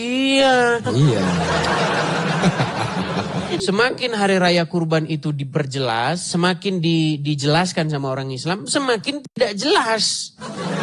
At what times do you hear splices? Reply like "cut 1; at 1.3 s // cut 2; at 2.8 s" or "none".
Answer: cut 1; at 3.6 s